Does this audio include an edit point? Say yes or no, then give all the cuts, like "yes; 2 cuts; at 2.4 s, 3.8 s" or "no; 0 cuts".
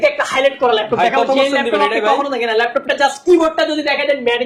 no; 0 cuts